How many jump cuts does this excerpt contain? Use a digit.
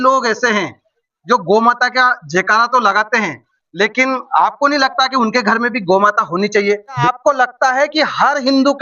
1